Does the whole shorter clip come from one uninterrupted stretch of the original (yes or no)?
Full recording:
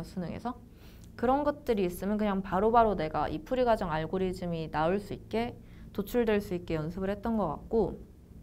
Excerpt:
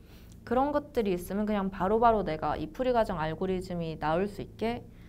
yes